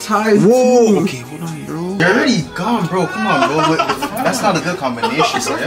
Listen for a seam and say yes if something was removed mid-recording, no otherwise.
yes